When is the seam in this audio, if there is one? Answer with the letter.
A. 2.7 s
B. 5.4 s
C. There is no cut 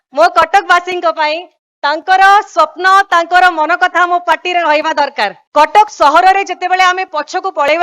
B